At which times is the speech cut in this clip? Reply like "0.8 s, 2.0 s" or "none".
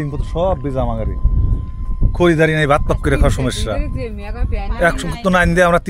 none